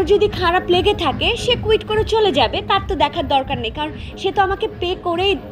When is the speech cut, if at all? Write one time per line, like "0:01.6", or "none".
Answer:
none